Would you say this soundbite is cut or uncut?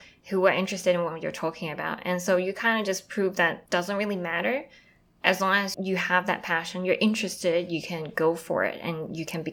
cut